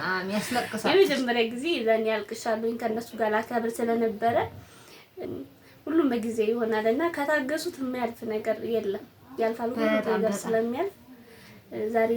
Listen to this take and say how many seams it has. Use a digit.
1